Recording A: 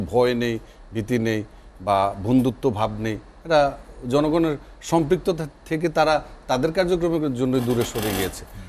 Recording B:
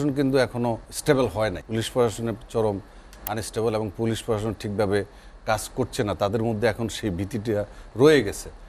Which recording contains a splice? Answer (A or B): B